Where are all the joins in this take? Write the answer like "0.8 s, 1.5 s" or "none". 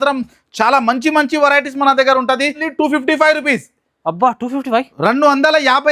2.7 s

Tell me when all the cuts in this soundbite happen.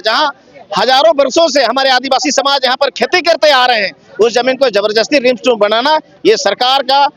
none

